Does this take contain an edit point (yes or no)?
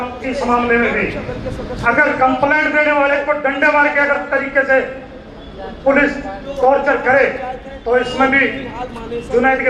no